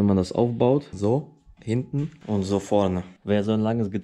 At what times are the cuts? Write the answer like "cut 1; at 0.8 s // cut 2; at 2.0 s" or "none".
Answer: cut 1; at 3.1 s

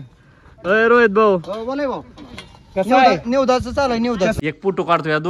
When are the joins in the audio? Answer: cut 1; at 4.4 s

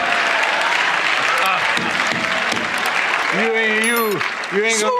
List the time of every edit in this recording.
cut 1; at 3.2 s

